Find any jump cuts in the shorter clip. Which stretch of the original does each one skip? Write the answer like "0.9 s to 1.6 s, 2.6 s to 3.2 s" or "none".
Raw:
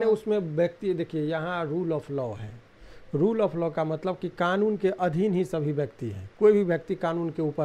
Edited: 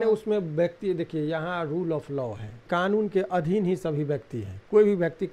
2.6 s to 4.3 s